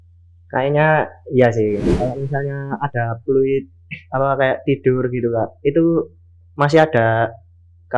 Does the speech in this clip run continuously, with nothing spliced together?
no; 1 cut; at 1.9 s

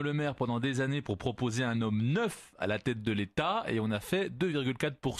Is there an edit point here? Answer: yes; 1 cut; at 2.3 s

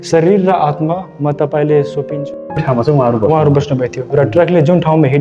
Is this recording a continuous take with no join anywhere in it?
no; 1 cut; at 2.6 s

